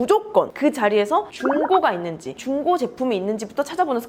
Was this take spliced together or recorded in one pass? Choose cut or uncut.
uncut